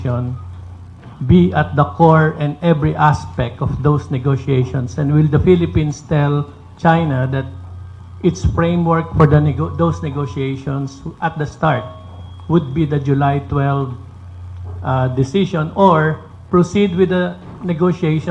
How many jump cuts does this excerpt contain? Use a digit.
1